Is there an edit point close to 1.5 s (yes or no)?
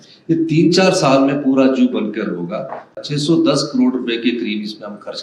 no